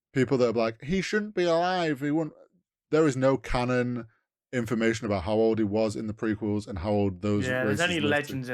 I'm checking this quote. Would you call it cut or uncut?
uncut